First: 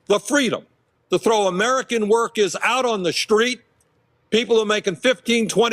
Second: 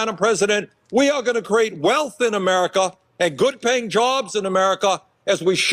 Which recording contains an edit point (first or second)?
first